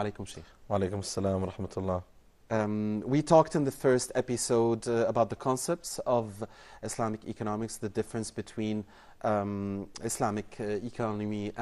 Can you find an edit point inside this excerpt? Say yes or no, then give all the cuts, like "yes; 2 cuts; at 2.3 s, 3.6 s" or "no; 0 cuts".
yes; 1 cut; at 4.4 s